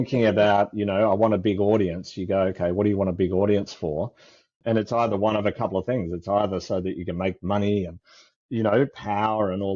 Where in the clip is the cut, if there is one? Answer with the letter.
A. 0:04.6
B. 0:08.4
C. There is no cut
A